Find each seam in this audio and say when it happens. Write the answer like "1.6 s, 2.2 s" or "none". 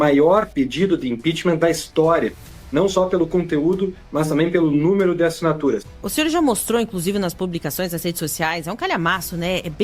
5.9 s